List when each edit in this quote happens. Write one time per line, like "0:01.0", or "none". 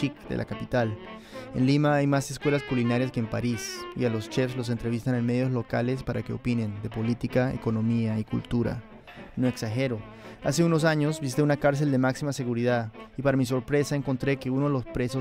none